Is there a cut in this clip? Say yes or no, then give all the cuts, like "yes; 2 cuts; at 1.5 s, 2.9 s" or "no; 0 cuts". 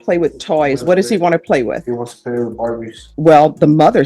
yes; 1 cut; at 3.0 s